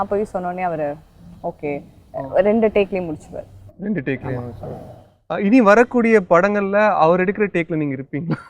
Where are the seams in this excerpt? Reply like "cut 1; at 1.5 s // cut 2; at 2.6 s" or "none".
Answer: none